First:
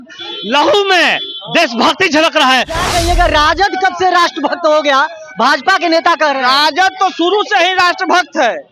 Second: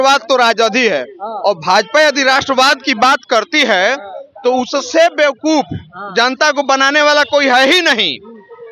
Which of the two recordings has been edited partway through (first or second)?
first